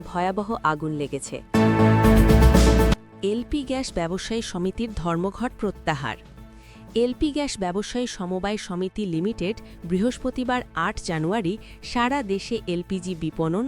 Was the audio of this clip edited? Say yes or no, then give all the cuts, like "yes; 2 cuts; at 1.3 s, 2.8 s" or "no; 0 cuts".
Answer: yes; 2 cuts; at 1.4 s, 3.0 s